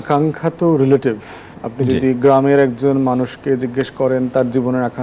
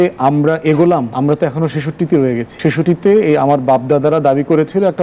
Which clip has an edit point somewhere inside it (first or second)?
second